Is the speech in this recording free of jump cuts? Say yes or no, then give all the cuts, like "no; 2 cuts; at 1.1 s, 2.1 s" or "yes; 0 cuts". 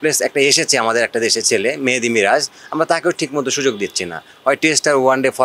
yes; 0 cuts